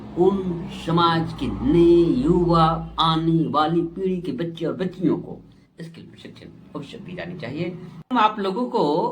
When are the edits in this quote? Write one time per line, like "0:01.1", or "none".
0:08.1